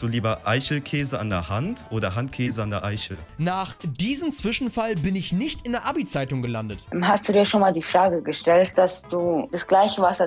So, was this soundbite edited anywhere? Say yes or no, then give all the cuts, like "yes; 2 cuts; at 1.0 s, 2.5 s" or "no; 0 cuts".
yes; 3 cuts; at 3.3 s, 6.8 s, 8.7 s